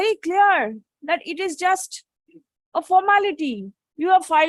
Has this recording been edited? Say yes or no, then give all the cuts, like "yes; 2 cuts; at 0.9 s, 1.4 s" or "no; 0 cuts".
no; 0 cuts